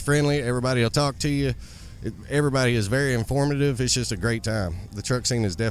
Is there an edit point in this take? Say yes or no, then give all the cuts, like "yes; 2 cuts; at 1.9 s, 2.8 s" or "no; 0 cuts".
no; 0 cuts